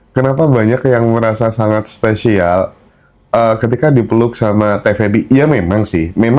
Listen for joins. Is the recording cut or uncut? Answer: uncut